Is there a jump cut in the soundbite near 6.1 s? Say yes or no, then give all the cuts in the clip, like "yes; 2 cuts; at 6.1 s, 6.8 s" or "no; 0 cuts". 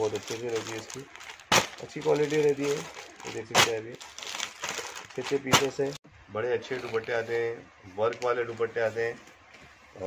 yes; 1 cut; at 6.1 s